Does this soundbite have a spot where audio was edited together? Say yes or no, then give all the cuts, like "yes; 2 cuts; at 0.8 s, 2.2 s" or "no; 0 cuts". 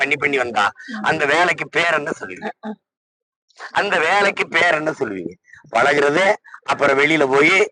no; 0 cuts